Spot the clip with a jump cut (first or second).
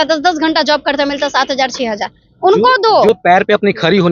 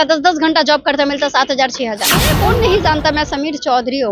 second